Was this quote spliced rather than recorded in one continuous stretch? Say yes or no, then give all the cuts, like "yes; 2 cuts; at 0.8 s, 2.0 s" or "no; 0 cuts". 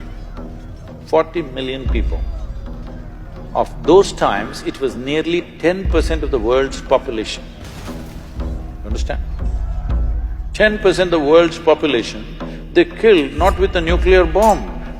no; 0 cuts